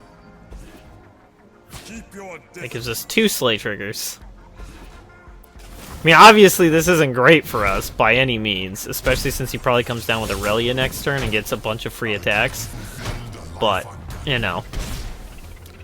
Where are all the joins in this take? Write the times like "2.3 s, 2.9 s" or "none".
5.4 s